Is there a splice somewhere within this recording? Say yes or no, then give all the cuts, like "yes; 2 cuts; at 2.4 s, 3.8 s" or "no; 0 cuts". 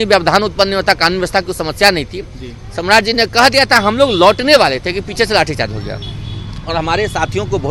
no; 0 cuts